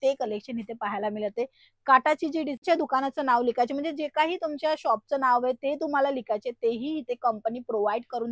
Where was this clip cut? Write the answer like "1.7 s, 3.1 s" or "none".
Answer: 2.6 s